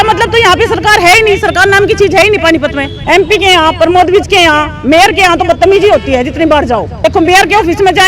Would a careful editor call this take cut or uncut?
cut